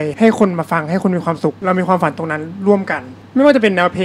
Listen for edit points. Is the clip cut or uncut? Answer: uncut